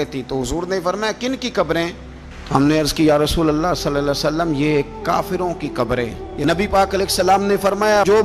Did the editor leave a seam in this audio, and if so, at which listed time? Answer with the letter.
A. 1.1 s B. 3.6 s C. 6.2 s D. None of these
C